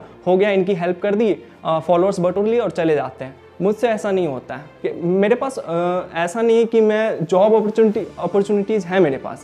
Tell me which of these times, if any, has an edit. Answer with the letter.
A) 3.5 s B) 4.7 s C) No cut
B